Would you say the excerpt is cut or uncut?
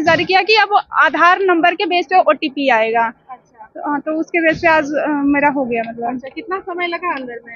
uncut